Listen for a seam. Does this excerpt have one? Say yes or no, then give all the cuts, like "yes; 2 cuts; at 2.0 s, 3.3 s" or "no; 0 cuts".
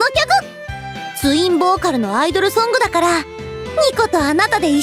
no; 0 cuts